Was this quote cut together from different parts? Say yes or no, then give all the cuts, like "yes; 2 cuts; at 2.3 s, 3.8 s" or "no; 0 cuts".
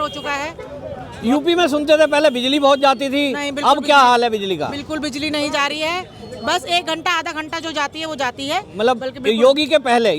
no; 0 cuts